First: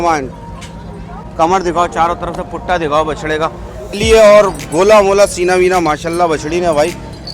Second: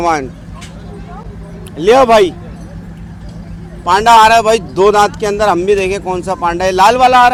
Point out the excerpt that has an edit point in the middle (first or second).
first